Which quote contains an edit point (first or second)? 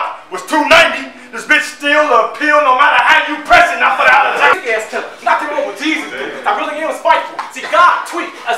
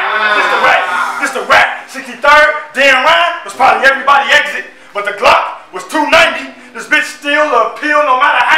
first